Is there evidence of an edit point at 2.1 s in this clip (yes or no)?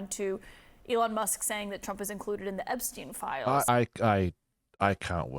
no